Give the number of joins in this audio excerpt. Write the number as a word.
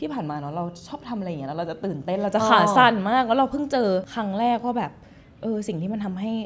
one